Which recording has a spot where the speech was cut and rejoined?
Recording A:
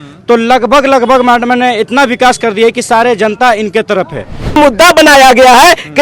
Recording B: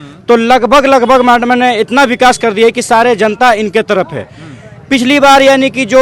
A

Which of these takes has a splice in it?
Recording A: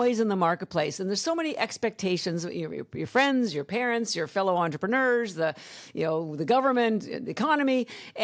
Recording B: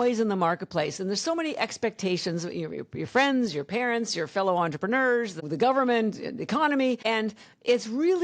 B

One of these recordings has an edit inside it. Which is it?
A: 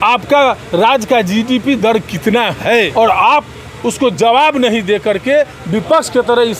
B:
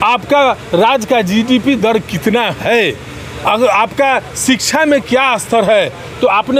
A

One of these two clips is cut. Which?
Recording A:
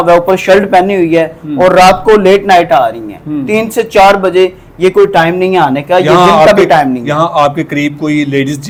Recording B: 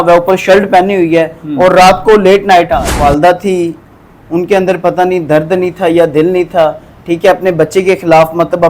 B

